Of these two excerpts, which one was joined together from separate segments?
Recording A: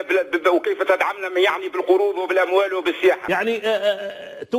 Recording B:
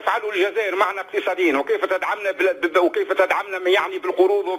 A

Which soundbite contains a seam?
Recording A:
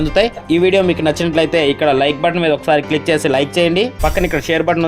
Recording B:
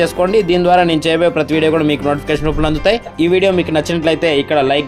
A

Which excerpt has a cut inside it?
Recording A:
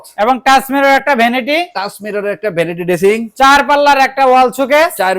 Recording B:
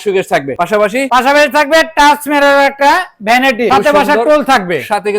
B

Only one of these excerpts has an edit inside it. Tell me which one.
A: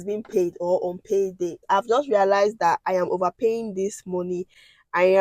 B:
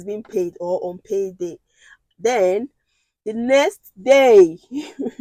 A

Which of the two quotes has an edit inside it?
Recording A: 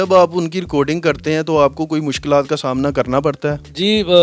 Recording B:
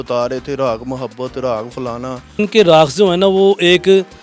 B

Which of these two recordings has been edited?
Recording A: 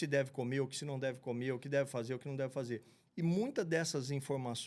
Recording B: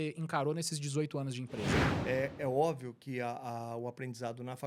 B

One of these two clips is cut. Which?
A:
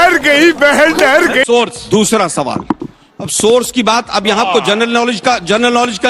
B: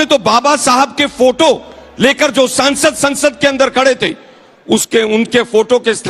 A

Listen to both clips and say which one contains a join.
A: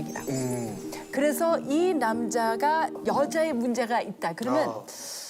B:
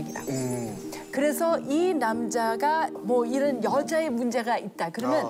A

